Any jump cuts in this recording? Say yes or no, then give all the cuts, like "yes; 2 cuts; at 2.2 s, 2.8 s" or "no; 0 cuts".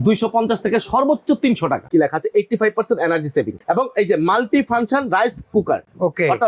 yes; 1 cut; at 1.8 s